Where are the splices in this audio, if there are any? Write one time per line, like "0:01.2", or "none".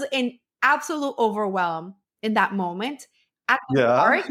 none